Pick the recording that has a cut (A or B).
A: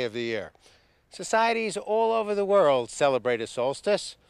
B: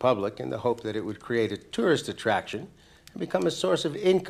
A